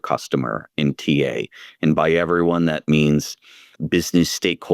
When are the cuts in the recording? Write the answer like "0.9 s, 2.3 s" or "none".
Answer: 2.8 s